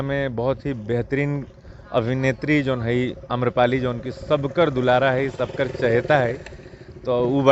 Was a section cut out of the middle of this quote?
no; 0 cuts

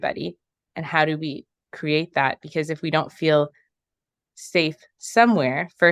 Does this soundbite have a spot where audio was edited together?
no; 0 cuts

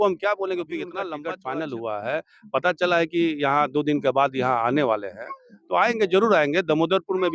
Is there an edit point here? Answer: yes; 1 cut; at 1.0 s

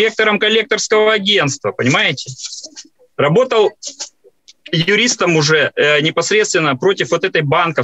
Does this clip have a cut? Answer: no; 0 cuts

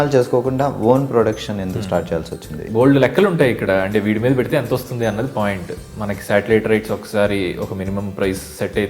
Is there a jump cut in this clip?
yes; 1 cut; at 2.7 s

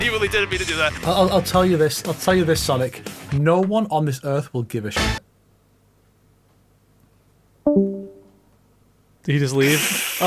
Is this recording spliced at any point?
yes; 1 cut; at 1.0 s

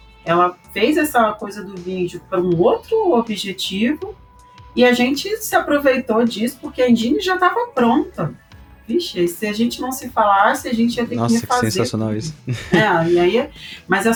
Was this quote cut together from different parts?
no; 0 cuts

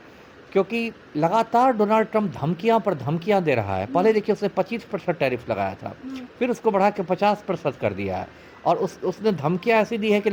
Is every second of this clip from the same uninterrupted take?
yes; 0 cuts

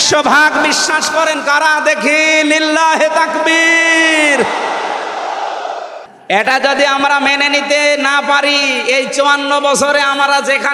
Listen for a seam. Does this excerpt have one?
yes; 1 cut; at 5.9 s

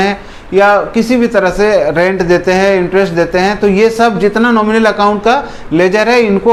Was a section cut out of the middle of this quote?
no; 0 cuts

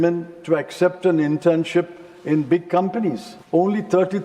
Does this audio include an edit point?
yes; 1 cut; at 3.3 s

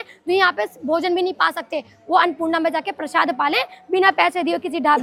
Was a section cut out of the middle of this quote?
no; 0 cuts

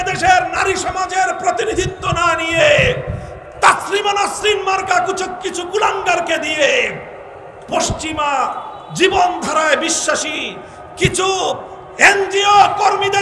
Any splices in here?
no; 0 cuts

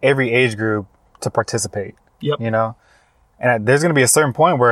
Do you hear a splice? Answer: no; 0 cuts

